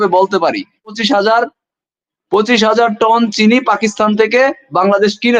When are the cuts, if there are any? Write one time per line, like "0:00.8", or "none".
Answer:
0:01.0